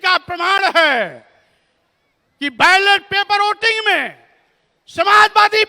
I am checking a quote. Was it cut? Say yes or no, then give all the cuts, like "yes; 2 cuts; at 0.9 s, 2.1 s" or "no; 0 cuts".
no; 0 cuts